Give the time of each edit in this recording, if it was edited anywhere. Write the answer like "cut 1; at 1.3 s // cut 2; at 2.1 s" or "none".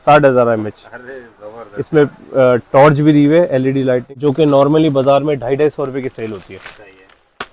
cut 1; at 4.1 s